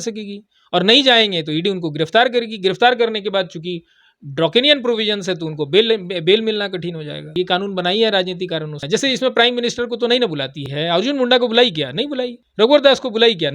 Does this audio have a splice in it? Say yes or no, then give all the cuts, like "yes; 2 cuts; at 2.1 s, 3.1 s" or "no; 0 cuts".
yes; 4 cuts; at 7.3 s, 8.8 s, 10.6 s, 12.4 s